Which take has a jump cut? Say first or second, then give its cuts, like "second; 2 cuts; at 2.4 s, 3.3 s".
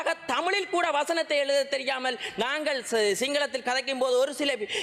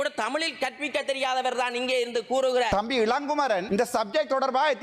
second; 2 cuts; at 2.7 s, 3.6 s